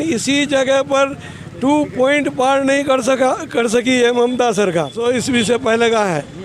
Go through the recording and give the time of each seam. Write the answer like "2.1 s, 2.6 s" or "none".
5.0 s